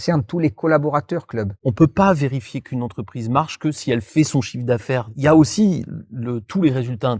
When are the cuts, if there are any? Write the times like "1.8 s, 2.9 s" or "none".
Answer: 1.7 s, 5.1 s

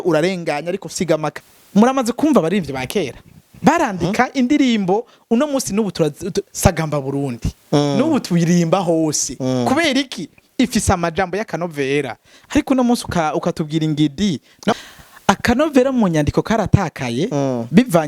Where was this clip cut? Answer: 1.3 s, 14.7 s

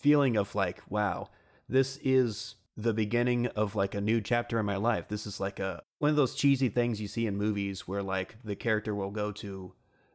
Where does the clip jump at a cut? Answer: 5.8 s

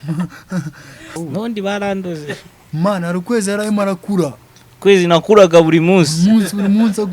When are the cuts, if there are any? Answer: 1.1 s

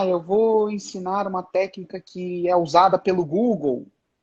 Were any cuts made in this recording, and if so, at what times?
none

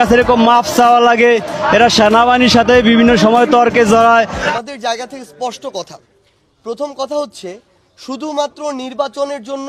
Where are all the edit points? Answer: 4.4 s

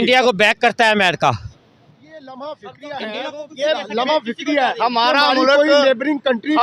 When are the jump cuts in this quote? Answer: 2.1 s

